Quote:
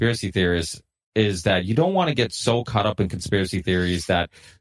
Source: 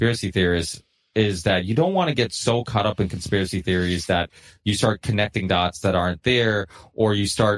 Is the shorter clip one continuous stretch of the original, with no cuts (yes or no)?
yes